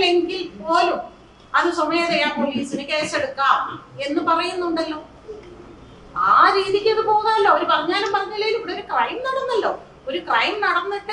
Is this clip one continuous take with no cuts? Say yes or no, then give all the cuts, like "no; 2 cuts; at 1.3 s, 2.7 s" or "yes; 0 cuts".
yes; 0 cuts